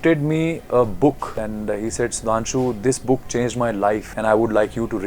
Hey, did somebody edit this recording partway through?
yes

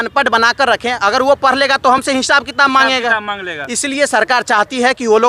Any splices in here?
no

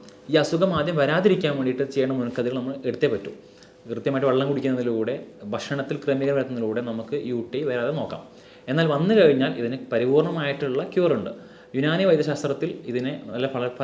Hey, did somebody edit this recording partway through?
no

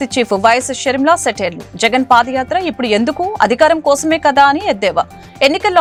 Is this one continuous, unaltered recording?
yes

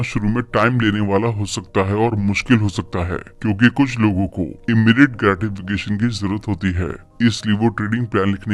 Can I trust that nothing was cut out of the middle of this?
yes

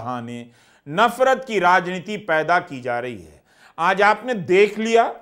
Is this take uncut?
yes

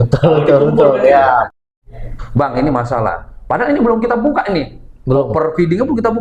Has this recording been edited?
yes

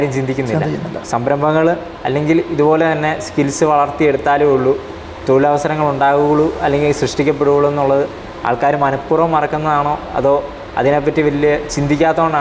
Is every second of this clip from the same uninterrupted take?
yes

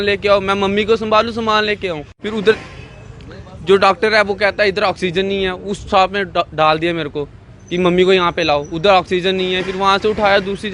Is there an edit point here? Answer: yes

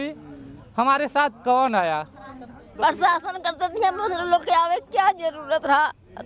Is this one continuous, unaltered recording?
no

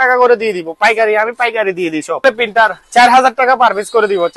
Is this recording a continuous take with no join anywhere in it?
no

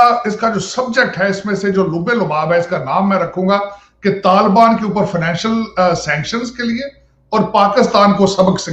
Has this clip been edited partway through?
no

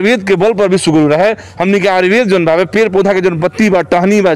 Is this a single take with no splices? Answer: yes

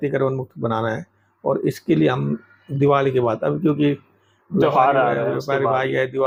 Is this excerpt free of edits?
yes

